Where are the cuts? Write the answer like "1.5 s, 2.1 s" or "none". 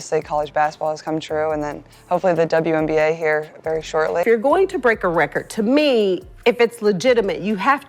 4.2 s